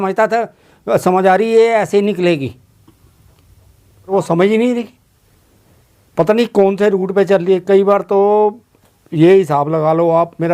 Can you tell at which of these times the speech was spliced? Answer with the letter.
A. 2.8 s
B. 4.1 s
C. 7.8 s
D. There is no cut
B